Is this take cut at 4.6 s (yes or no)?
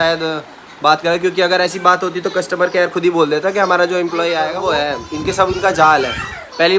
yes